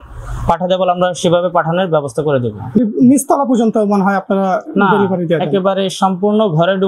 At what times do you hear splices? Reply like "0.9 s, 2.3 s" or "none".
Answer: 2.8 s